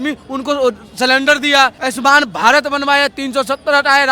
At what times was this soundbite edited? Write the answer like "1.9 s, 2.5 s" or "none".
1.8 s